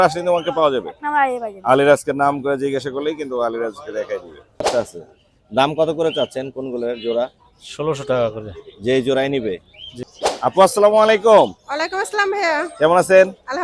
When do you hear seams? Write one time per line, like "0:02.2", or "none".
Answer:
0:04.7
0:10.1